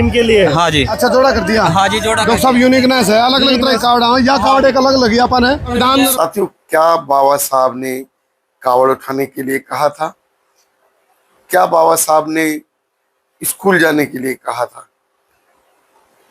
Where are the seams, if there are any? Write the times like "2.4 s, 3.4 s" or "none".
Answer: 6.1 s

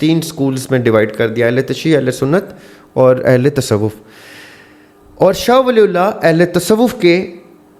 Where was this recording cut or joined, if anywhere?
none

